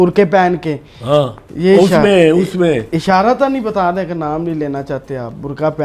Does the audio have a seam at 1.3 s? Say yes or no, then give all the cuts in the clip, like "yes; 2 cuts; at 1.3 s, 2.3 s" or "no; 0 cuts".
no; 0 cuts